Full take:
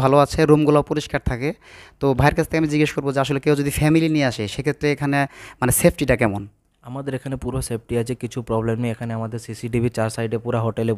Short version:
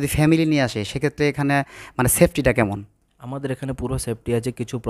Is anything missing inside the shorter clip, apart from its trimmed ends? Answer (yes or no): no